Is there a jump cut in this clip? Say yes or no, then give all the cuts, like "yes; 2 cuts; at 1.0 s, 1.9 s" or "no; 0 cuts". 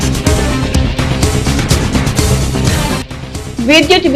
yes; 1 cut; at 3.0 s